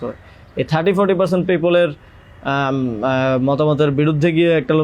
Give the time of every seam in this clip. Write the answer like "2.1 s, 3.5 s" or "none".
none